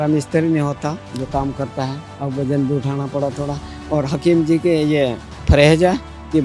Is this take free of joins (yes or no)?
no